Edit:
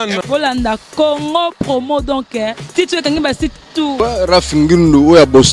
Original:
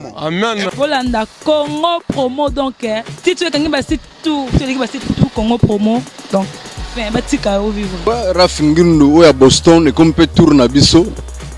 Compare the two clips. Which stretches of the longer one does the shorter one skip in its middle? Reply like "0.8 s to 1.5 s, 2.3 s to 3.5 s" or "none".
4.4 s to 8.0 s